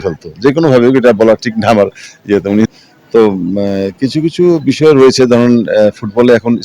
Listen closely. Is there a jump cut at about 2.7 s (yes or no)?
yes